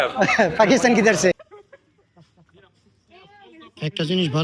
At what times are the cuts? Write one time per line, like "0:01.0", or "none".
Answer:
0:01.4